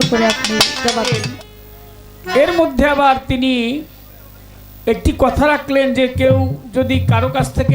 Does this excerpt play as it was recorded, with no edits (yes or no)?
no